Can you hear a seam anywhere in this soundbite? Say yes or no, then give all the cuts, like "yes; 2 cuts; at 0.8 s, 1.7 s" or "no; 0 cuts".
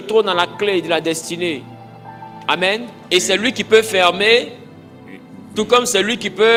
no; 0 cuts